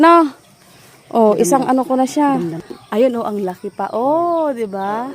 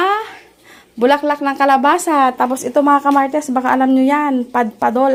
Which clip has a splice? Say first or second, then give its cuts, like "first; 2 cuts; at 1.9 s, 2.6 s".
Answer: first; 1 cut; at 2.6 s